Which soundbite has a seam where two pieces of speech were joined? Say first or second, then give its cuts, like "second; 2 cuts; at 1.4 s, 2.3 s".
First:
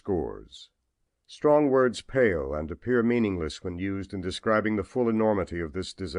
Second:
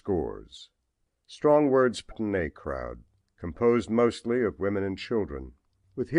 first; 1 cut; at 2.0 s